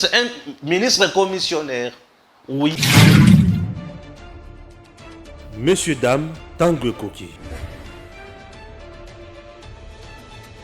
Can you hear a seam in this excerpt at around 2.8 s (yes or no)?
yes